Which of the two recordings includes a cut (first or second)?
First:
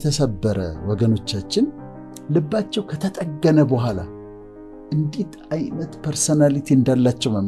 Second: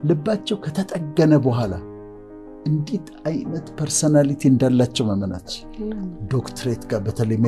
second